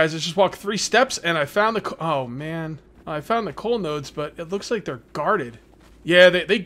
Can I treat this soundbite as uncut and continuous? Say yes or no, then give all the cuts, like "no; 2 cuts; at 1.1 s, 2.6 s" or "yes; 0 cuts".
no; 1 cut; at 2.9 s